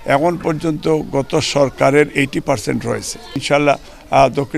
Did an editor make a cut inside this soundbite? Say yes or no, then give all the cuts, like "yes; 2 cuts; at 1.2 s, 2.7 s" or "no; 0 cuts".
yes; 1 cut; at 3.4 s